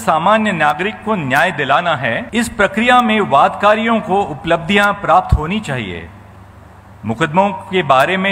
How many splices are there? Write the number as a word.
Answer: one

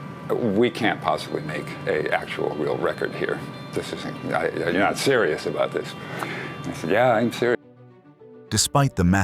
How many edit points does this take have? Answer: zero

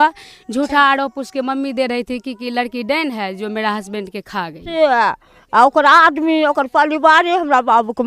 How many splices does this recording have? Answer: one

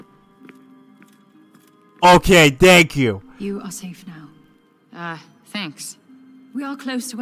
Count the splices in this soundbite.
zero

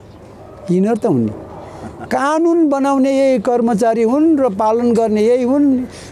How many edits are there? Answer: zero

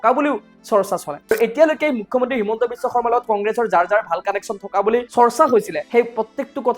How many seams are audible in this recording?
three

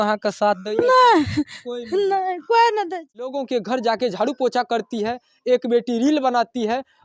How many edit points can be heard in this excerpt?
one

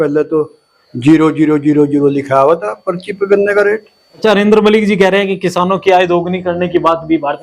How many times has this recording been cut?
one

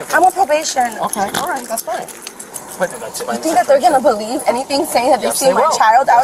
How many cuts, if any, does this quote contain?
one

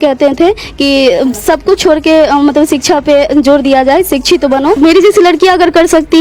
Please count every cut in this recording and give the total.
one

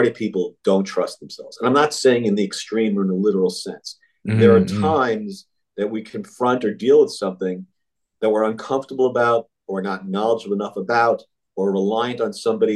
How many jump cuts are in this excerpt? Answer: zero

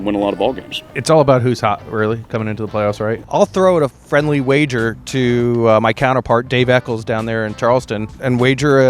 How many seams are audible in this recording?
one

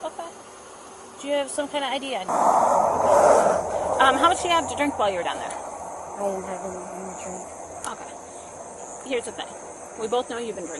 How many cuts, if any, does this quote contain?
one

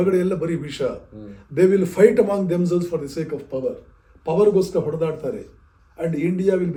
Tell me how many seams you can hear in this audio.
zero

